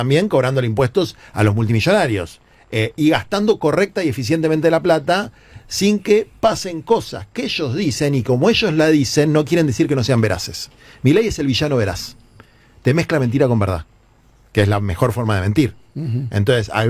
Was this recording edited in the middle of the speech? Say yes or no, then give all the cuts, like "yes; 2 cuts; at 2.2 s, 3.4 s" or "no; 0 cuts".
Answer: no; 0 cuts